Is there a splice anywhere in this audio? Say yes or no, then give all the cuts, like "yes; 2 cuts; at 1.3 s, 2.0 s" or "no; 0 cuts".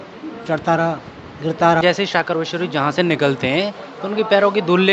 yes; 1 cut; at 1.8 s